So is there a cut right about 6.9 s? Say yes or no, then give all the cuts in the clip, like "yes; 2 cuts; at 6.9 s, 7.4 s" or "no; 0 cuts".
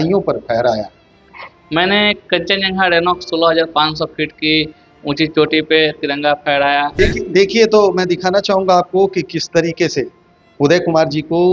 yes; 1 cut; at 6.9 s